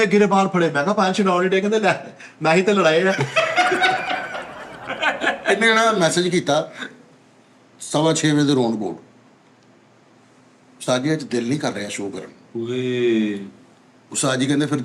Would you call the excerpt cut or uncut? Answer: uncut